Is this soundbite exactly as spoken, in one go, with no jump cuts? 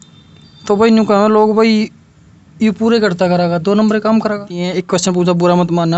no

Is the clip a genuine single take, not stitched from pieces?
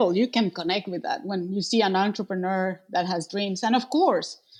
yes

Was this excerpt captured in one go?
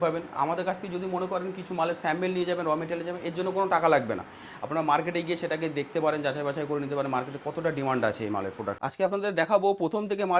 no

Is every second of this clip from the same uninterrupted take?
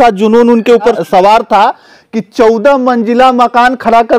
no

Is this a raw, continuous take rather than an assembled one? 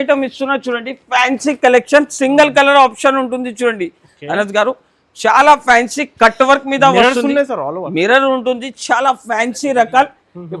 yes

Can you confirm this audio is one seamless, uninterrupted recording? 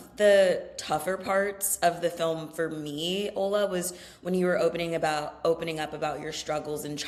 yes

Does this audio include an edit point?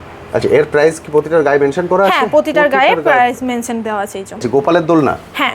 yes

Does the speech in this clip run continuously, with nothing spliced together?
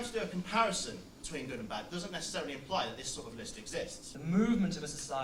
no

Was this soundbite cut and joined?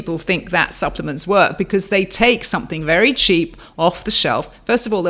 no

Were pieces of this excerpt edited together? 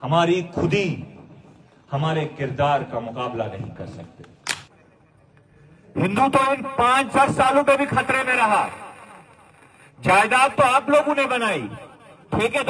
yes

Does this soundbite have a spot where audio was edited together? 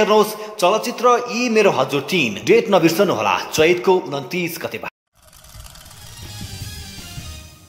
yes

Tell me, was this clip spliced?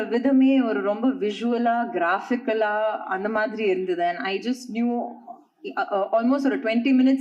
no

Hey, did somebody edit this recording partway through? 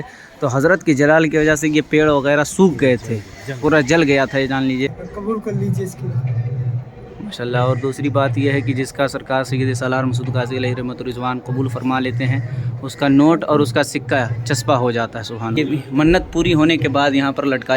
yes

